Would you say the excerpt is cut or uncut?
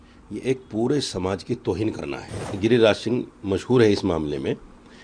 cut